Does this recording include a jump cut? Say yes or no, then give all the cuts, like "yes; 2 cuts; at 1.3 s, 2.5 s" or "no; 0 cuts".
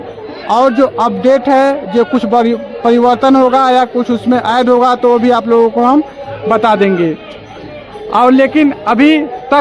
no; 0 cuts